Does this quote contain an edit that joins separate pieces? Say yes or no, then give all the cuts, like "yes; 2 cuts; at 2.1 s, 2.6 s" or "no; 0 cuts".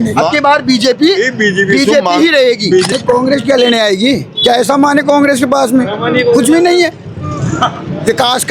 yes; 1 cut; at 2.9 s